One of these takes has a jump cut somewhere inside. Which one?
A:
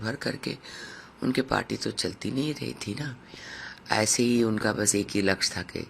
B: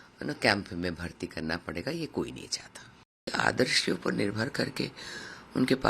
B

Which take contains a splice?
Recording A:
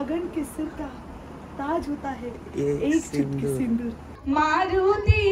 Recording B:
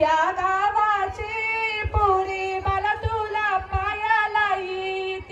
A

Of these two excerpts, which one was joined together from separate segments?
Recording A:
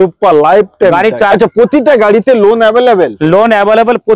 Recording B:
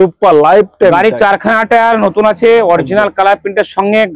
A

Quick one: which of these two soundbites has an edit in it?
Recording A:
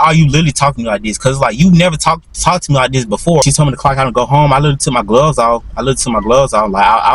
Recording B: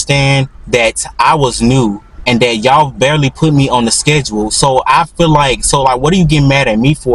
A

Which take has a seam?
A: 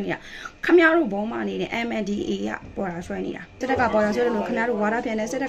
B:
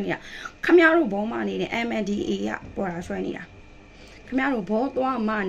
A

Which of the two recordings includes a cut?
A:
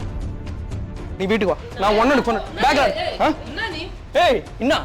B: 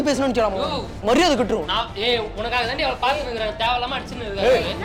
A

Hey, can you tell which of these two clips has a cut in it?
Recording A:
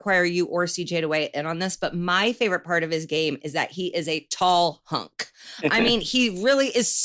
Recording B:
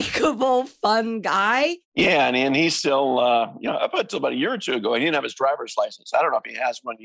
B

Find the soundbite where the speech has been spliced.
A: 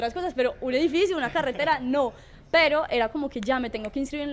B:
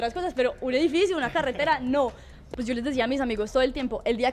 B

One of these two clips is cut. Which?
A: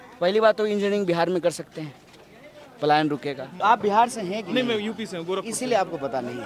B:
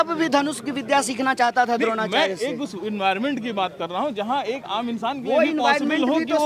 A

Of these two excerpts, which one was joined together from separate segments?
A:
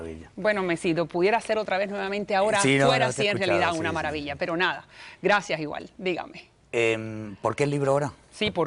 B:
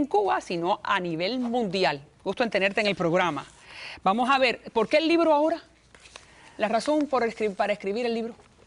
B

